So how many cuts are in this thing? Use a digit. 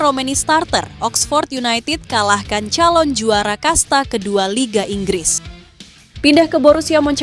1